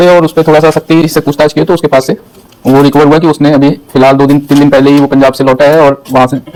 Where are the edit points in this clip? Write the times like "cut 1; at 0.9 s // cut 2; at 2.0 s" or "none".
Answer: none

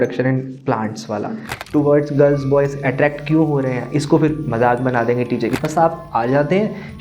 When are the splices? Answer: cut 1; at 1.5 s // cut 2; at 5.5 s

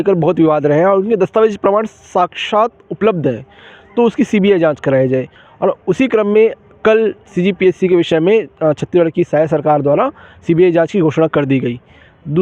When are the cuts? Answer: none

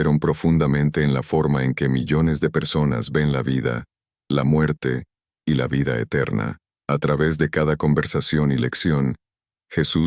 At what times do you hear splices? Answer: cut 1; at 6.7 s

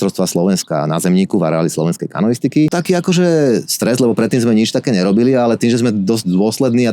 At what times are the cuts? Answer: cut 1; at 2.8 s

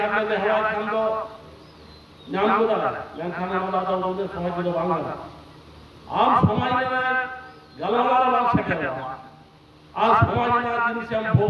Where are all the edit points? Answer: none

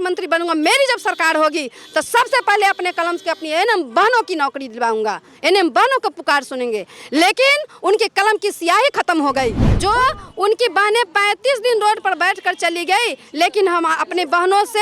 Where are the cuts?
cut 1; at 9.7 s

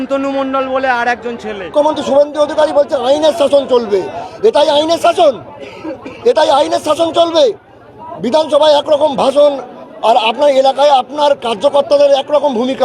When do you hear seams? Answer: cut 1; at 1.7 s

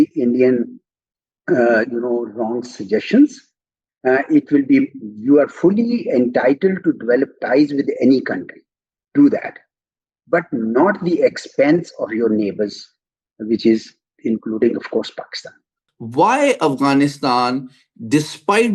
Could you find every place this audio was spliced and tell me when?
cut 1; at 15.8 s

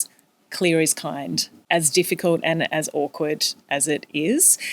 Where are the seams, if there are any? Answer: cut 1; at 1.6 s

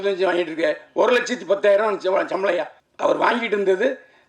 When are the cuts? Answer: cut 1; at 2.8 s

